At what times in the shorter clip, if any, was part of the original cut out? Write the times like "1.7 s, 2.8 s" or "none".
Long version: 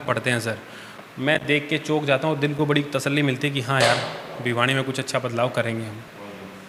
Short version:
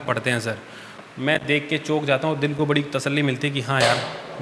none